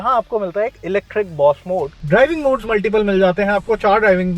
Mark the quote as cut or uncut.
cut